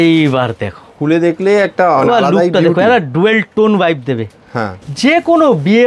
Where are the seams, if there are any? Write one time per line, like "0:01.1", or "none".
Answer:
none